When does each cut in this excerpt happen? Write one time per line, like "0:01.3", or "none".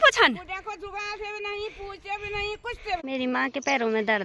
0:03.0